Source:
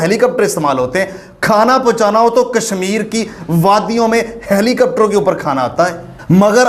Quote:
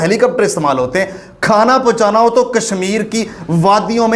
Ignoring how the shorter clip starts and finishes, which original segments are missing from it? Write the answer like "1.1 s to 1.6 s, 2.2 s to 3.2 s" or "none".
none